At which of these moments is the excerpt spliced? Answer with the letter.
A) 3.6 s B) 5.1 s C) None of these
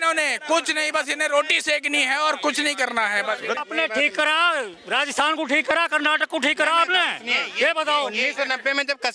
A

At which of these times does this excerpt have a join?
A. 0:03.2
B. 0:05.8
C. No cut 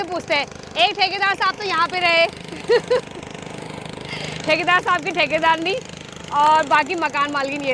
C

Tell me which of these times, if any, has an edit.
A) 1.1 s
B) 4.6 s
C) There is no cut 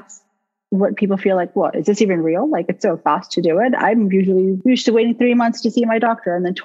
B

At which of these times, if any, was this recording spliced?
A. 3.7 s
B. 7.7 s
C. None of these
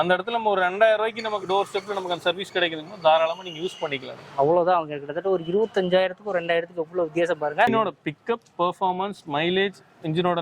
B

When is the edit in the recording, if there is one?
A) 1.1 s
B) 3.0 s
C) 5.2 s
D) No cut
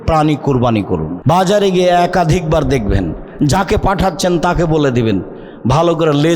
A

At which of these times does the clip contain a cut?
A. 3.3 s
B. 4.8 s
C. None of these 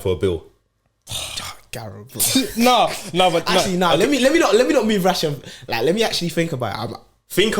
C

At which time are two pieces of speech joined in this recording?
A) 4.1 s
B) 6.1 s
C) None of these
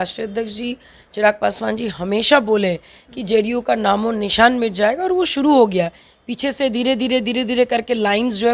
C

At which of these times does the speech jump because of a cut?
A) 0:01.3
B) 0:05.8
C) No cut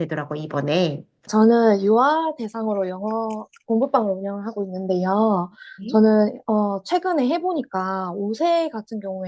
A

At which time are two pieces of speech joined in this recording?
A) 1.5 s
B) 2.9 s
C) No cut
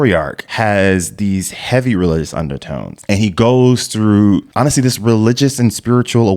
B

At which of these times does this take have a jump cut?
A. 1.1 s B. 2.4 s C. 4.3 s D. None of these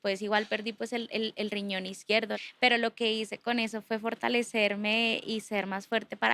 B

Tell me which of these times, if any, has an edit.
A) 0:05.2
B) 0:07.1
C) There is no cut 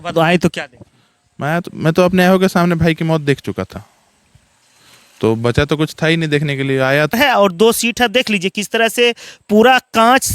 B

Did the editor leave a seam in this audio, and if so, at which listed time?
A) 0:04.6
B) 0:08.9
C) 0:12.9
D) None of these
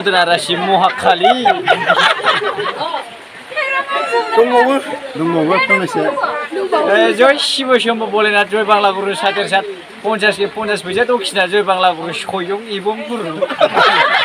D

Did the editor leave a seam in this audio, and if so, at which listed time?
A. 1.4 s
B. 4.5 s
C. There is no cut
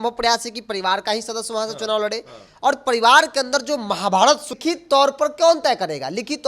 B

